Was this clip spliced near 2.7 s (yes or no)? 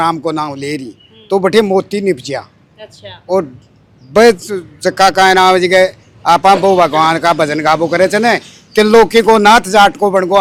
no